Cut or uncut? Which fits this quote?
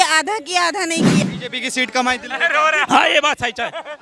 cut